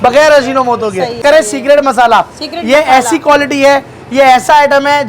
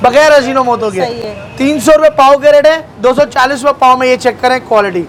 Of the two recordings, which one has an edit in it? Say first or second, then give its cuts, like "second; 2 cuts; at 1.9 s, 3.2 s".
first; 1 cut; at 1.2 s